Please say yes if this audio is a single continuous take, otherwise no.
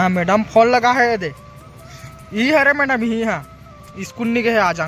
yes